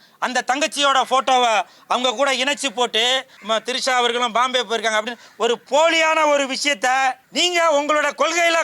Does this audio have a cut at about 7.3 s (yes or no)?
yes